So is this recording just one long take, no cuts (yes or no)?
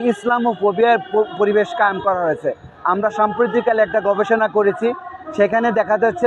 yes